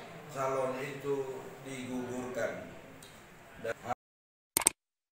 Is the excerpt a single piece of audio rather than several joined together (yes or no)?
no